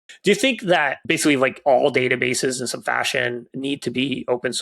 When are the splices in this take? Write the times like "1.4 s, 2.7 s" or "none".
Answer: 1.0 s